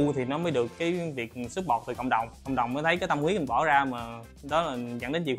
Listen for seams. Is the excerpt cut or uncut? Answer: uncut